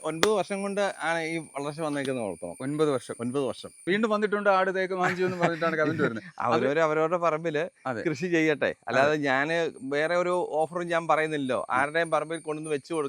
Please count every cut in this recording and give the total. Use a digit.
1